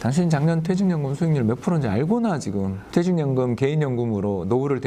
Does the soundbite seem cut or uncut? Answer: cut